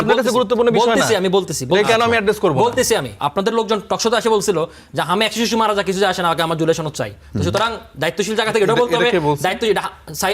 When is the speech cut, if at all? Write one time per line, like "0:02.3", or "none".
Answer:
0:03.1